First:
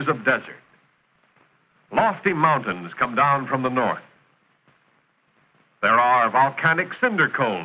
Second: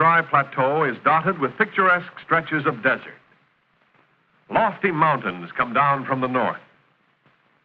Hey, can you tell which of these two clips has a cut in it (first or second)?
first